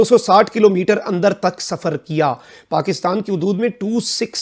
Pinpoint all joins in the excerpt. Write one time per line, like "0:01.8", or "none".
none